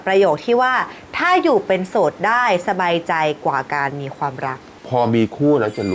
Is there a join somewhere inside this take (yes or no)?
yes